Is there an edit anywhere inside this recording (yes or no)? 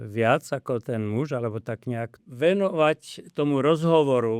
yes